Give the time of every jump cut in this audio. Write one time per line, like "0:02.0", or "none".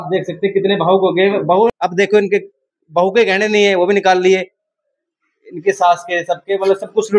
0:01.7